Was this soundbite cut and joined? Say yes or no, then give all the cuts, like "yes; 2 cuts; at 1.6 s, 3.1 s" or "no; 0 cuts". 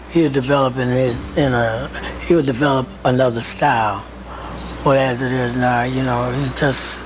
no; 0 cuts